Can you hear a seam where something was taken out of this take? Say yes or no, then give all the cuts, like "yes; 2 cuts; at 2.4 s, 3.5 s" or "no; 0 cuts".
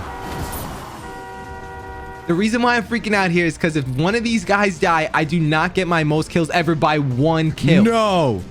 yes; 2 cuts; at 2.2 s, 7.6 s